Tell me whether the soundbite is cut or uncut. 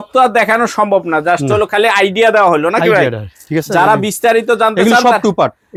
uncut